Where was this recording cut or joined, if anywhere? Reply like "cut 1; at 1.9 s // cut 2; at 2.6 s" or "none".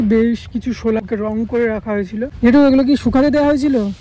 cut 1; at 1.0 s // cut 2; at 2.3 s